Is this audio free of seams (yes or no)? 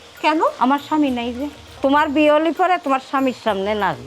no